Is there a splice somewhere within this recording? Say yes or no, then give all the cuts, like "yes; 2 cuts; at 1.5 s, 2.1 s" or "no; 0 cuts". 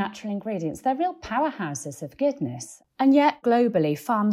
yes; 2 cuts; at 2.7 s, 3.4 s